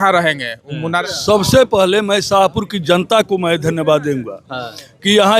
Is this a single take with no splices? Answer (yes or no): no